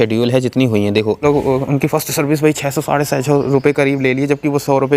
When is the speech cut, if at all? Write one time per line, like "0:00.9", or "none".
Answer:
0:01.2